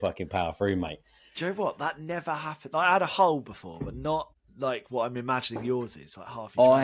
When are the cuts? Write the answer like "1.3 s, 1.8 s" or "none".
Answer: 4.4 s